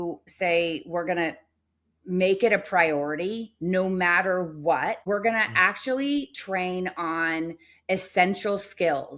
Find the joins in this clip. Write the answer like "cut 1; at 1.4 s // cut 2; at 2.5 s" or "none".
cut 1; at 5.0 s